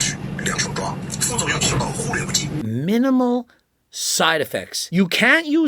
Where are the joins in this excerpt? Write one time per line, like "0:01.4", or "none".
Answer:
0:01.0
0:02.6
0:04.8